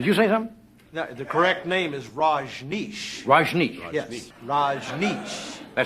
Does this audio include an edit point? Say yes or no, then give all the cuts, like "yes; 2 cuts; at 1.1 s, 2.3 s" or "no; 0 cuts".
yes; 1 cut; at 4.2 s